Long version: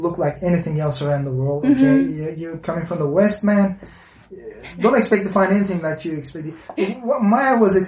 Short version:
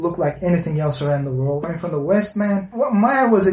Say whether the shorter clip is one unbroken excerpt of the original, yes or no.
no